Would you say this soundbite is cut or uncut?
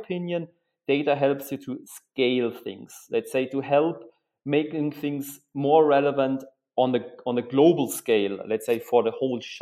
uncut